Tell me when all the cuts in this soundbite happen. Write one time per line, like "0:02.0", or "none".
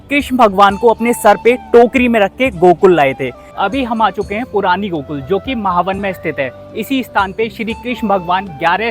0:03.4